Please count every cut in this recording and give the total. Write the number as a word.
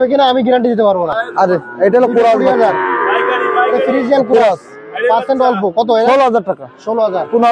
zero